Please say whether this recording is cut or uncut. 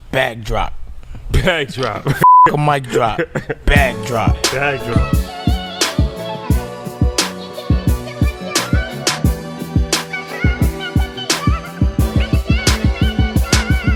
uncut